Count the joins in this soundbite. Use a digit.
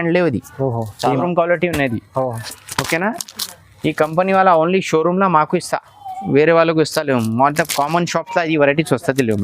1